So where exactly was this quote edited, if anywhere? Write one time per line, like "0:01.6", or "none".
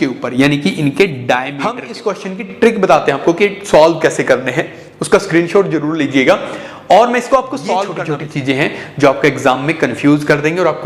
0:01.9
0:08.0